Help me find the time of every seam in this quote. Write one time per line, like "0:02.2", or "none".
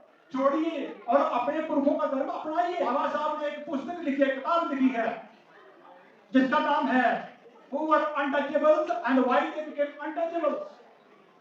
none